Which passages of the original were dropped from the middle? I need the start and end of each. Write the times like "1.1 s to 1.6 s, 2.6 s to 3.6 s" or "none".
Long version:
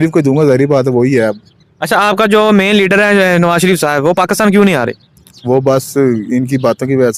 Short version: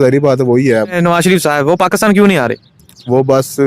1.4 s to 3.3 s

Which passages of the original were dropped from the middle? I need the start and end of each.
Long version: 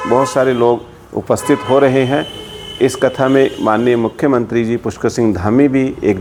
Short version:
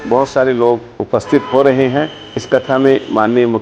0.9 s to 1.1 s, 2.6 s to 2.9 s

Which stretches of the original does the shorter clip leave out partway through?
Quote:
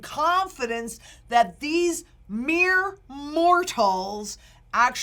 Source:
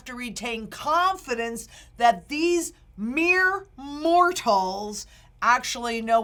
none

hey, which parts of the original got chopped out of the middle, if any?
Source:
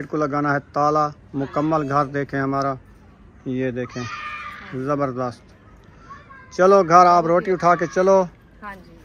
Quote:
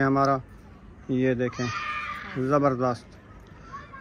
none

